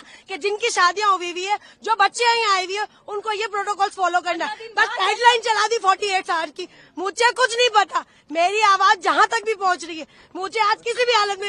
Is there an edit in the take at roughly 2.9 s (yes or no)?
no